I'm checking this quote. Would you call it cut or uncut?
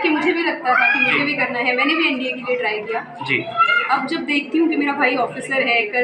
uncut